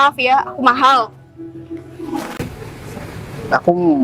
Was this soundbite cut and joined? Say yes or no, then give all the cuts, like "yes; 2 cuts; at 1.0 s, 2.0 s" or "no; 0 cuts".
yes; 1 cut; at 2.4 s